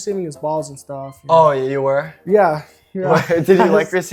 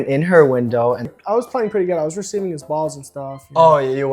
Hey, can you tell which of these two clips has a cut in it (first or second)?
second